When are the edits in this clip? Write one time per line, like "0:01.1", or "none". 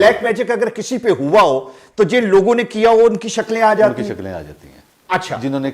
none

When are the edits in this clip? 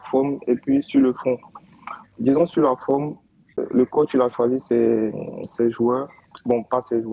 0:02.1
0:03.6

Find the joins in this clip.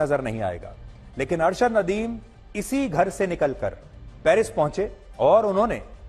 none

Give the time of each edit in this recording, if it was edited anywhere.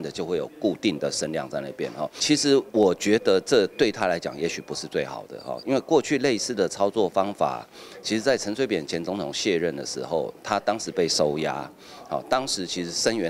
0:02.2

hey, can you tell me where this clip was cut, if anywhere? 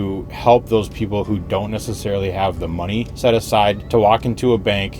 0:03.1
0:03.8

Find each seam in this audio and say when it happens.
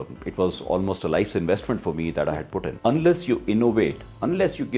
0:02.7

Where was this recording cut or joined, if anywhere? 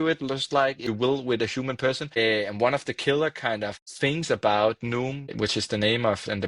0:00.9
0:02.2
0:03.8
0:05.3

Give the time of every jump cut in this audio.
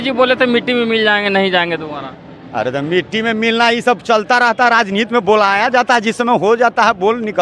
none

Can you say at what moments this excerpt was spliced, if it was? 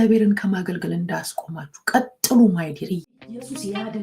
0:03.0

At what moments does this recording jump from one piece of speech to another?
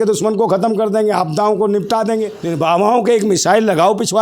0:02.4

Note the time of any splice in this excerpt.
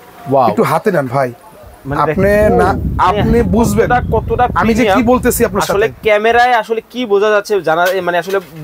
none

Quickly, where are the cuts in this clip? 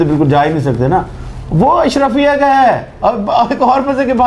0:02.9

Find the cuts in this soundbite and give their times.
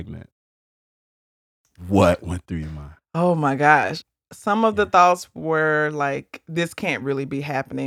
none

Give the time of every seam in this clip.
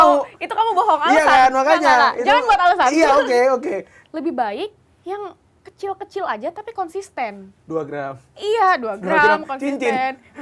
0:03.9

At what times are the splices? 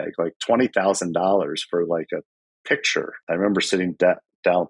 0:03.2

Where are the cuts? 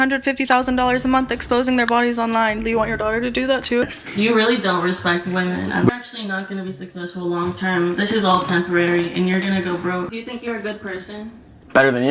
0:03.9
0:05.9
0:10.1

